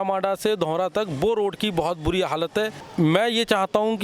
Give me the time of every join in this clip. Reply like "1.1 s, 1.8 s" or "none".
2.8 s